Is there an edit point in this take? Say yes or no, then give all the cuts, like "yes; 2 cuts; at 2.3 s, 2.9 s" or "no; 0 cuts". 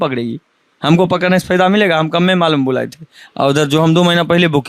no; 0 cuts